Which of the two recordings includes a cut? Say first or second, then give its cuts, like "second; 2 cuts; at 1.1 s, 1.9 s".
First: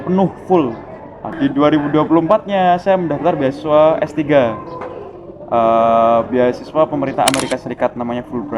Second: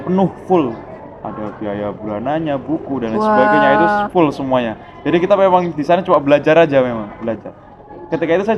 first; 1 cut; at 1.3 s